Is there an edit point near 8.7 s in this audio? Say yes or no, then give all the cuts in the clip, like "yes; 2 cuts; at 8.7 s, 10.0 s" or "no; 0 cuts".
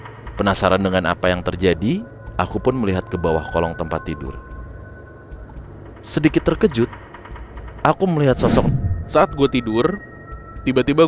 yes; 1 cut; at 8.7 s